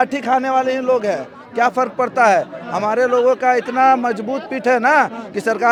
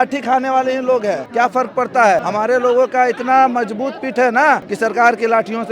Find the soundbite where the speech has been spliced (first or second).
second